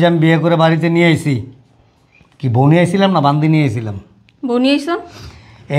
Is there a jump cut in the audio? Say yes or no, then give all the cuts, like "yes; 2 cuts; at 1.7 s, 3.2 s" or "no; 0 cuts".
no; 0 cuts